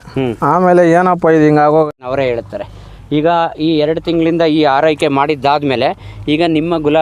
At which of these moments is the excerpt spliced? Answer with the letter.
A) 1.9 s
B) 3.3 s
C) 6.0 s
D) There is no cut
A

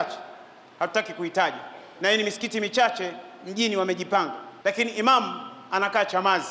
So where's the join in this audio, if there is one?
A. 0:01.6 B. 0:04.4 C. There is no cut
B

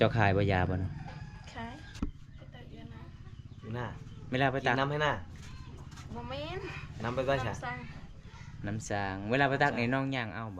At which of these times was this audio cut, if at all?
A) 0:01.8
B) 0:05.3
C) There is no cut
A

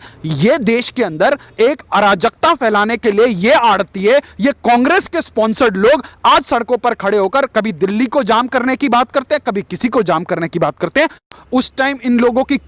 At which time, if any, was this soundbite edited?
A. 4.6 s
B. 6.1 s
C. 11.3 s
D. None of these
C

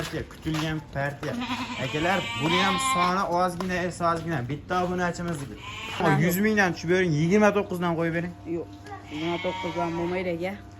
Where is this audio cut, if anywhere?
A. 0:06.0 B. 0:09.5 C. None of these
A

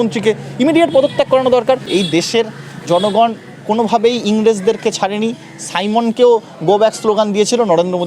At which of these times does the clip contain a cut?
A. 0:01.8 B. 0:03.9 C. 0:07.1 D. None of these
A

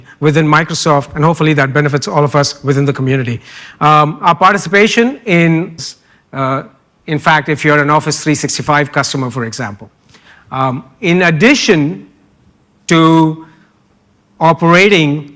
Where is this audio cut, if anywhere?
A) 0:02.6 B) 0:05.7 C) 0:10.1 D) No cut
D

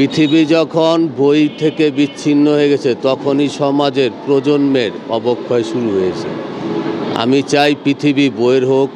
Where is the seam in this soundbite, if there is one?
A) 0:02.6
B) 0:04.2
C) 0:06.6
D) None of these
D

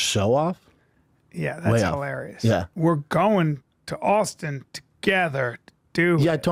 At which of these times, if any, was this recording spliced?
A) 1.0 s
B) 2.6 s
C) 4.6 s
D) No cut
D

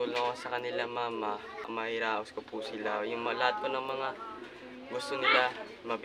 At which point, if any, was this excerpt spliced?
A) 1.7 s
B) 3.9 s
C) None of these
A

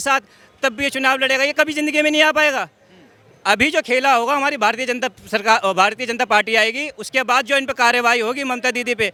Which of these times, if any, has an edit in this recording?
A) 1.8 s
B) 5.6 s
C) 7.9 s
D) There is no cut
D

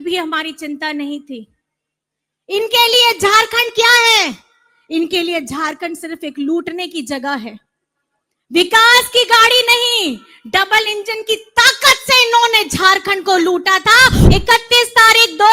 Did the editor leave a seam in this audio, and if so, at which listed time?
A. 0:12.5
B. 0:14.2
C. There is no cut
B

